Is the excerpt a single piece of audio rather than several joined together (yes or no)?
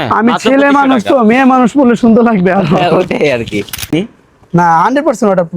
no